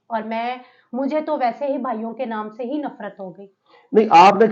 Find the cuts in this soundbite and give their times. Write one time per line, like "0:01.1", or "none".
none